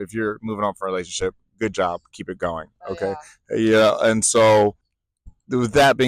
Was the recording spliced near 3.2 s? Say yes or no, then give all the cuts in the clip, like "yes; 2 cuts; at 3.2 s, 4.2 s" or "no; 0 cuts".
no; 1 cut; at 4.6 s